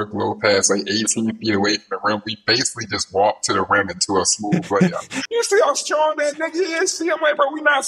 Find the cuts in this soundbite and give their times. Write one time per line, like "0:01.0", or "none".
0:05.1